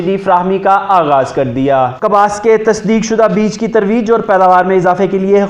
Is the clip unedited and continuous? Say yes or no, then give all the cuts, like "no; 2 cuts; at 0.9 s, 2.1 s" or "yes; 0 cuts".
yes; 0 cuts